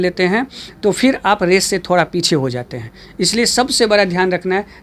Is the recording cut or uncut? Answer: uncut